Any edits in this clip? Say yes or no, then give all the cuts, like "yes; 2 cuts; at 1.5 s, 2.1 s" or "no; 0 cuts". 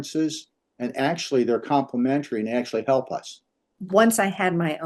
yes; 1 cut; at 3.8 s